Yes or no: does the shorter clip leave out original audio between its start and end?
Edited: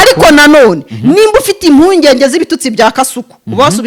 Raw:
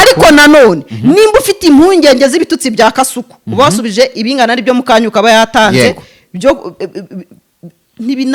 no